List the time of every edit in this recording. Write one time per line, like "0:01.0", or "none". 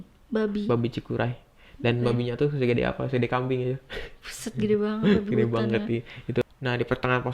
0:06.4